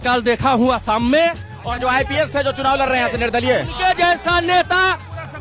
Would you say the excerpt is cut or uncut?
uncut